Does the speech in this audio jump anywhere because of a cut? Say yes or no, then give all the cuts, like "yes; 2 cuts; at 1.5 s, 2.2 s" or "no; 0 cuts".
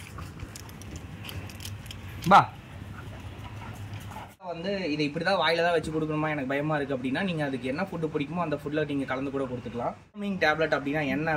yes; 2 cuts; at 4.6 s, 10.3 s